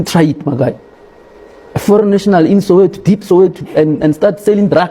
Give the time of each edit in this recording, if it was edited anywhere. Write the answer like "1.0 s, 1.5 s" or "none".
none